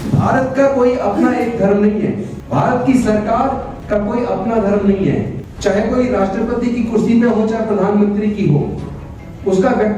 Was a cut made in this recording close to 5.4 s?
yes; 3 cuts; at 2.3 s, 3.7 s, 5.4 s

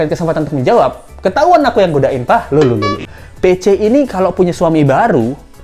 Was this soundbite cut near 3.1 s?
yes; 1 cut; at 3.1 s

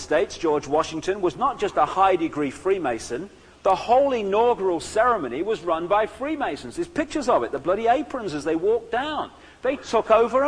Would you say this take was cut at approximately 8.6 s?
yes; 1 cut; at 8.6 s

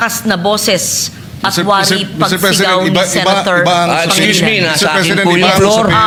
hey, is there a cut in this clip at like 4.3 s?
no; 0 cuts

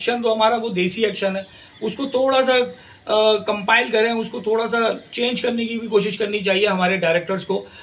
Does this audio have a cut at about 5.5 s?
no; 0 cuts

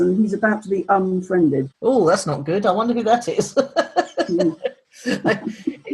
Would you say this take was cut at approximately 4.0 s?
no; 1 cut; at 1.7 s

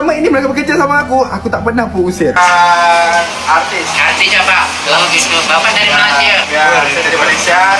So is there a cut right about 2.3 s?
yes; 1 cut; at 2.3 s

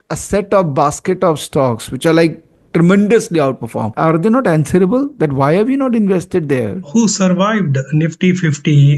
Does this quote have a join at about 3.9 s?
yes; 2 cuts; at 3.9 s, 6.9 s

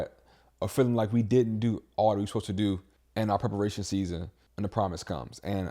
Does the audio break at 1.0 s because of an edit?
no; 2 cuts; at 3.0 s, 4.4 s

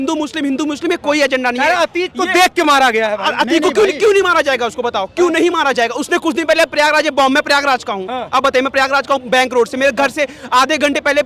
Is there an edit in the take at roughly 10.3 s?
no; 0 cuts

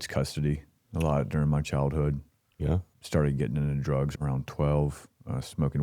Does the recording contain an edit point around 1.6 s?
no; 2 cuts; at 2.9 s, 4.1 s

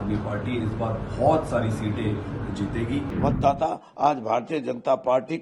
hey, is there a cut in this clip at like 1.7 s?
no; 1 cut; at 3.1 s

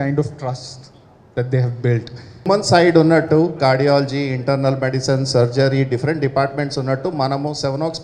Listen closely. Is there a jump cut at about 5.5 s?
no; 1 cut; at 2.5 s

